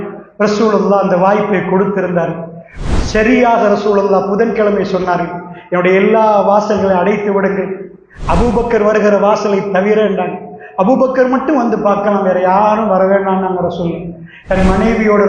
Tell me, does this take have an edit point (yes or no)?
no